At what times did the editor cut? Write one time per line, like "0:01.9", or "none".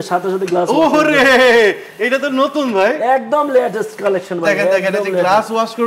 none